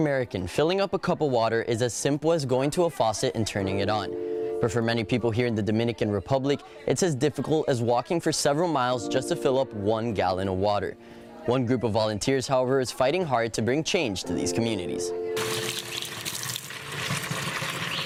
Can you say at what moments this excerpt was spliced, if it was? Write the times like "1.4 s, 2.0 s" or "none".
none

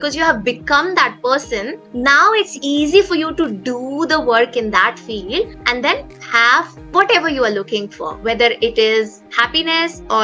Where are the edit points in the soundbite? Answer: 9.3 s

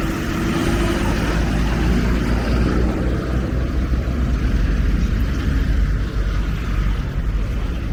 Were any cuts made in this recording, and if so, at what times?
none

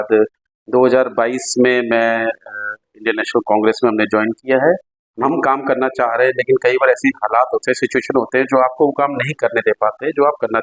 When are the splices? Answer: 5.0 s

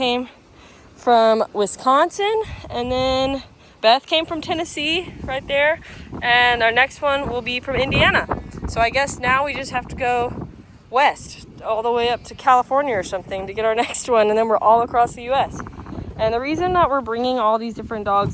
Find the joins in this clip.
15.9 s

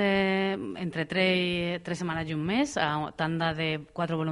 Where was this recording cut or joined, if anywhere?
none

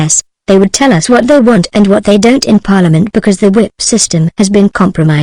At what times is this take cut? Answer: 2.7 s

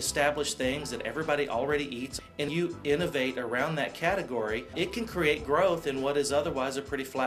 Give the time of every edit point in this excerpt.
2.8 s

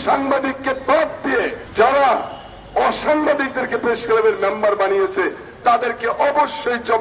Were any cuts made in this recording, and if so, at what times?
none

